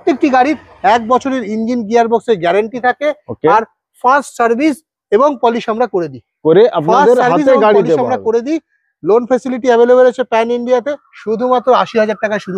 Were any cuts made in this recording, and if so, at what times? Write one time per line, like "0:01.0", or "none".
none